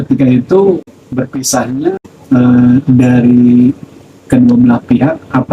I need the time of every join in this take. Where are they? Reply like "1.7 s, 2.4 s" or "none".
1.0 s, 2.1 s